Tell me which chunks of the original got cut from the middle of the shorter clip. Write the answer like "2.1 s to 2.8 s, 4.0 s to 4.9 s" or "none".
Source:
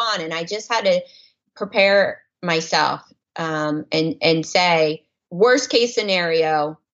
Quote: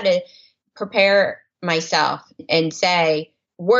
3.2 s to 4.2 s